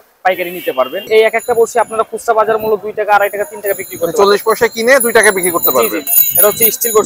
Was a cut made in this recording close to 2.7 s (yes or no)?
no